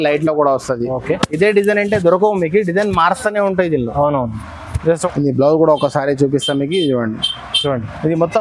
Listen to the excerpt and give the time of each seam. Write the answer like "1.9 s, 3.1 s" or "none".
5.1 s